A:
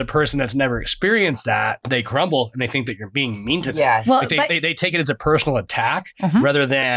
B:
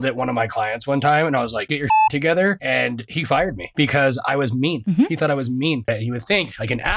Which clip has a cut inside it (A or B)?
B